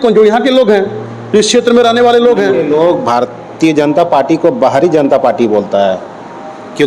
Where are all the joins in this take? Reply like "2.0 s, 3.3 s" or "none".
2.5 s